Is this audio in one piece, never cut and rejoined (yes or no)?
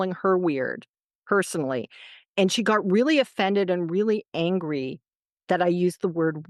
yes